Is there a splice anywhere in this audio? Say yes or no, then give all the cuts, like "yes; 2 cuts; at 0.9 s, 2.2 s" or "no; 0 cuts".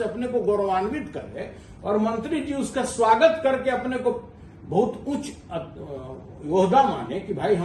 no; 0 cuts